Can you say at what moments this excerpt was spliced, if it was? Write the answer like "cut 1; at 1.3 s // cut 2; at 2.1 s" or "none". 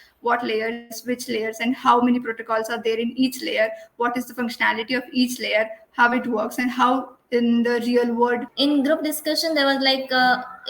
cut 1; at 8.5 s